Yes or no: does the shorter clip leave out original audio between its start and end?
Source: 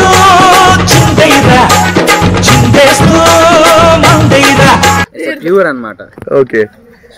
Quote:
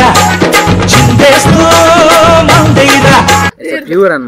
no